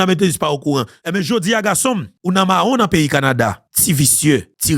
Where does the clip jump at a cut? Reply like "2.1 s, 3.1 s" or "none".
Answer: 1.0 s